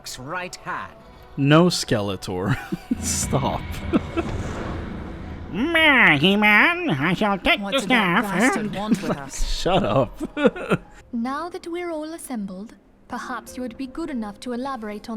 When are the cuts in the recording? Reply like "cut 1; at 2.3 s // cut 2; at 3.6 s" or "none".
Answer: cut 1; at 11.0 s